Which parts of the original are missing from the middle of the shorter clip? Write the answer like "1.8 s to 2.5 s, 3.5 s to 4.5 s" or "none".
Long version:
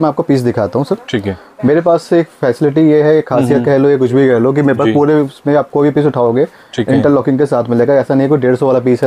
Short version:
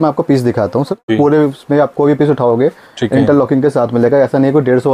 1.1 s to 4.9 s